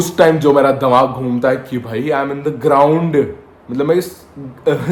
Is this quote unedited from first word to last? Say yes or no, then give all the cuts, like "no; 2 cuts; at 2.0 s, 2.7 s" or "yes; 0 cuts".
yes; 0 cuts